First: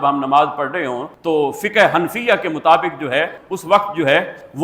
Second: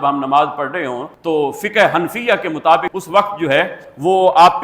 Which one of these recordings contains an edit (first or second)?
second